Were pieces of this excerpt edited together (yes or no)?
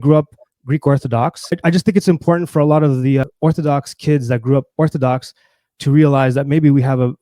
yes